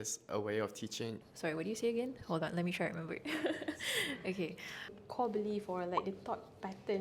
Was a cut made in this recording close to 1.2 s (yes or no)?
yes